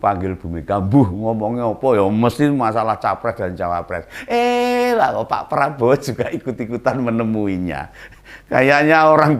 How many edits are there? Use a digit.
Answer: 0